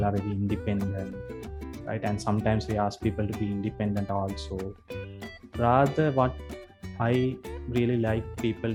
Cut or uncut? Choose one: uncut